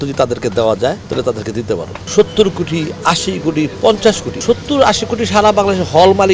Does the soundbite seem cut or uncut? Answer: cut